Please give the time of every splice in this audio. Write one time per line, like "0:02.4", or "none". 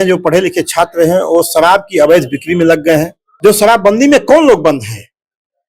0:03.2